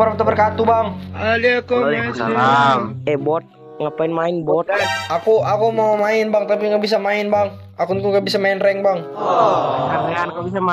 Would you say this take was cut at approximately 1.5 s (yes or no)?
no